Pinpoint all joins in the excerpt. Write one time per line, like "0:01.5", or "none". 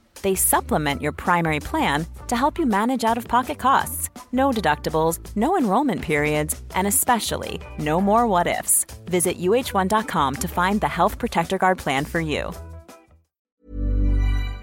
0:13.5